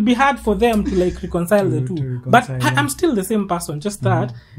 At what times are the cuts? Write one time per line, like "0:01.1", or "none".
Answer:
none